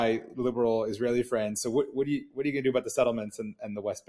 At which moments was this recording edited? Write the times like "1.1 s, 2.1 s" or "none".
none